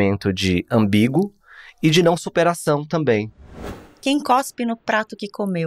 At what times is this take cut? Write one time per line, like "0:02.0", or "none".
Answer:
0:03.4

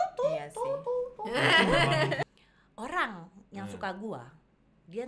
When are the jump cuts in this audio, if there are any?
0:02.2

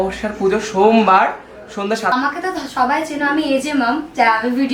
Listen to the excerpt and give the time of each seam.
0:02.1

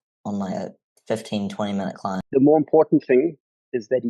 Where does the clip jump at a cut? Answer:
0:02.2

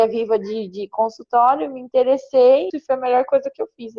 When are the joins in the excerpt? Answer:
0:02.7

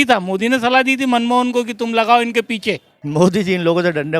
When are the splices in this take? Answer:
0:02.9

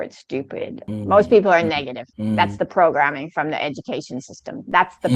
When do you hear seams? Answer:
0:00.9

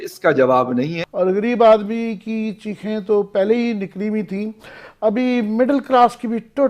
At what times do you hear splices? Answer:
0:01.0

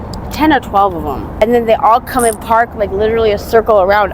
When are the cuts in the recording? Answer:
0:01.3

